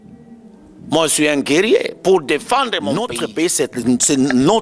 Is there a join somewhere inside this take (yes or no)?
yes